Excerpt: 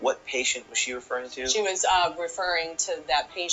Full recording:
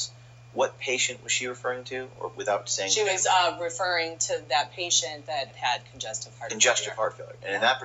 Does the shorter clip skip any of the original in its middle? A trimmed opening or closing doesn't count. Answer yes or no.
yes